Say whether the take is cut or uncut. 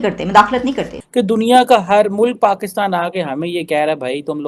cut